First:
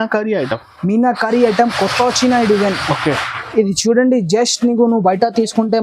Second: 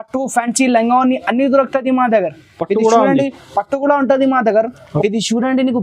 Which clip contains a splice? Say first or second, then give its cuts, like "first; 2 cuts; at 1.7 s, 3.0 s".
second; 1 cut; at 4.9 s